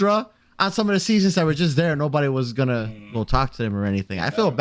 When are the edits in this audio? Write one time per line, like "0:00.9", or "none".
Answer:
none

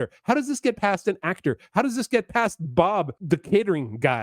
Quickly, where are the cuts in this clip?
0:03.2

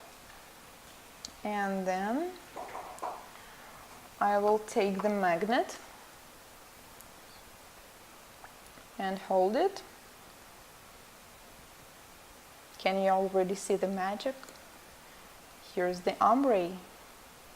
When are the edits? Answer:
0:12.3

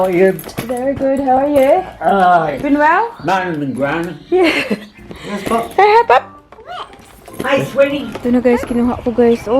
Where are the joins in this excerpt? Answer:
0:08.1

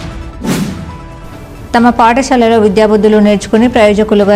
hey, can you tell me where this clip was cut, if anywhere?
0:01.0

